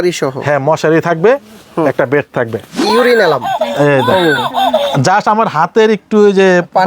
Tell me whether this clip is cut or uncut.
cut